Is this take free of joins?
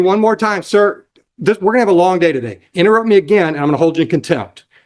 yes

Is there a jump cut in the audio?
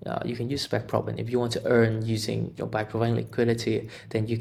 no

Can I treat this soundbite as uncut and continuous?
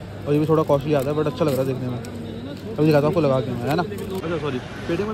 yes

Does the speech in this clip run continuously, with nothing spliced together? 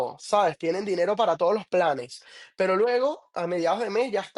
yes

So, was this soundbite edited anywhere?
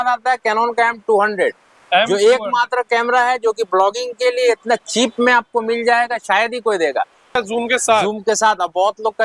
yes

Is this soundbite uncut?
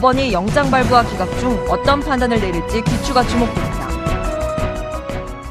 yes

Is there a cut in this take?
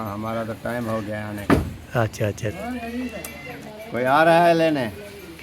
yes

